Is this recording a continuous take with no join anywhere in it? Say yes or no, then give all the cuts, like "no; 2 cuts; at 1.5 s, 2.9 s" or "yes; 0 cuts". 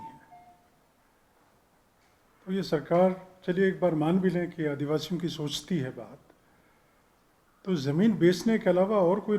yes; 0 cuts